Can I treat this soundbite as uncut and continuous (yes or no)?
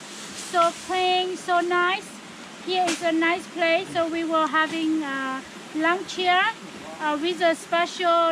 yes